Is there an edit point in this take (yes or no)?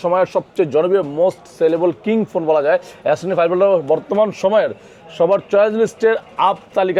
no